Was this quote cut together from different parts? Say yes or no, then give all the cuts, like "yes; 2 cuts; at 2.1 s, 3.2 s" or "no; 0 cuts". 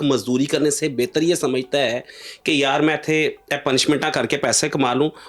no; 0 cuts